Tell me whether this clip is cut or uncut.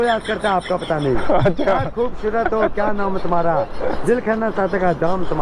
uncut